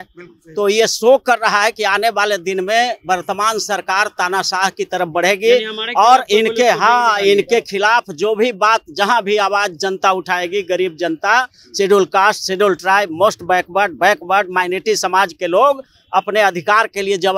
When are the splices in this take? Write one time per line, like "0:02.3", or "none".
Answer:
none